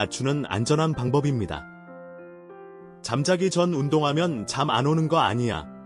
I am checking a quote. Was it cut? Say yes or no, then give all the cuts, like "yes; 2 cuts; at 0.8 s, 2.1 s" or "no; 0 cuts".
no; 0 cuts